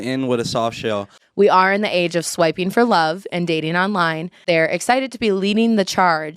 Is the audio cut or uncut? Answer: cut